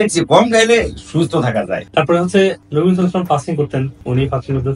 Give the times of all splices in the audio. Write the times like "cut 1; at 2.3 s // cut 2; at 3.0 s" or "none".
none